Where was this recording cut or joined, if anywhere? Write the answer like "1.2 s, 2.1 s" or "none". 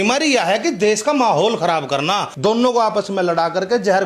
2.3 s